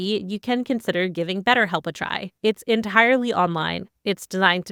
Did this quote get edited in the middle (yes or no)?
no